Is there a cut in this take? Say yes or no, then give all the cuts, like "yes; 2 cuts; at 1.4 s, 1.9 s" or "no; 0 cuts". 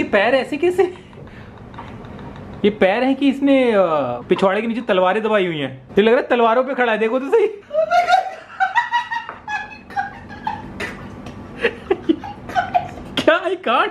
no; 0 cuts